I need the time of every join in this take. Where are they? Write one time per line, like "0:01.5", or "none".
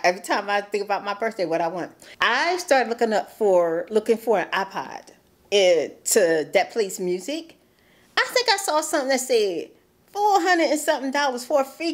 none